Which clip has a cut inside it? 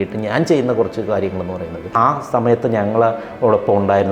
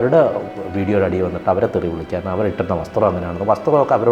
first; 1 cut; at 1.9 s

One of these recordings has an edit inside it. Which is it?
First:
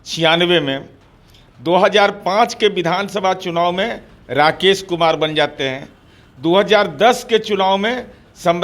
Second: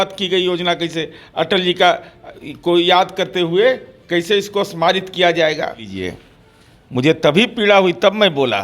second; 1 cut; at 5.9 s

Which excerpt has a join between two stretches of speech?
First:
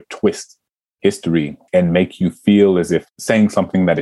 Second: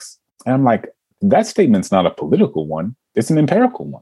second; 2 cuts; at 1.2 s, 3.0 s

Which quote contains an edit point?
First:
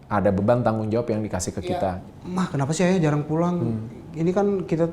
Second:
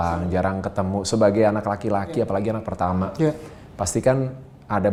first; 1 cut; at 1.6 s

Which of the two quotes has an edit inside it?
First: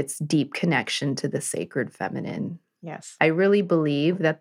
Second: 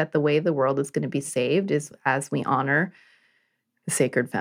first; 1 cut; at 3.1 s

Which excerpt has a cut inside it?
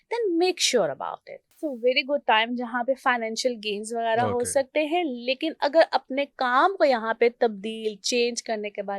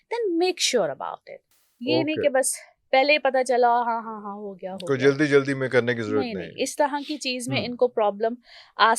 first; 1 cut; at 1.6 s

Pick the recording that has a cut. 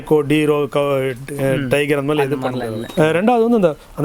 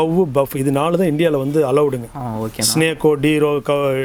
first; 1 cut; at 2.8 s

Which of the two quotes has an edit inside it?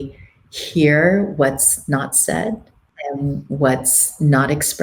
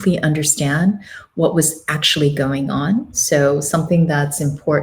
first; 1 cut; at 2.9 s

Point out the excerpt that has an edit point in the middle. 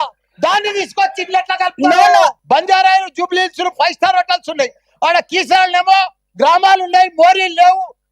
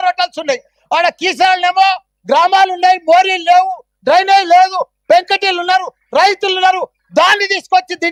first; 1 cut; at 2.4 s

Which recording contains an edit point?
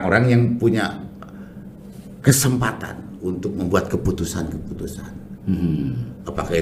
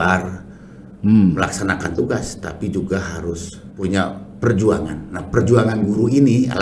second; 1 cut; at 3.7 s

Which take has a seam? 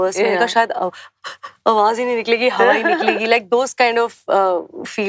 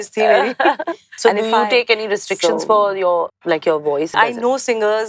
second; 3 cuts; at 1.0 s, 3.4 s, 4.1 s

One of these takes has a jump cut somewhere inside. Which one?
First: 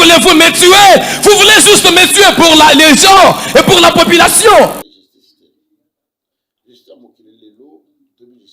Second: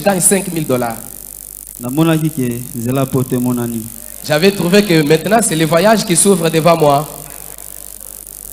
first; 1 cut; at 4.9 s

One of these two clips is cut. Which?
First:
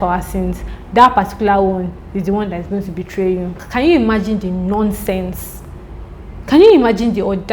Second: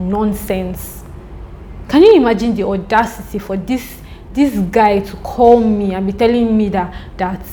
first; 1 cut; at 3.5 s

